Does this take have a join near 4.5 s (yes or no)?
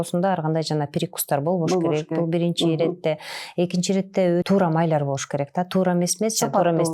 yes